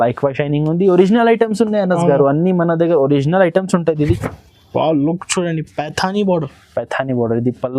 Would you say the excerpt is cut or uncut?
cut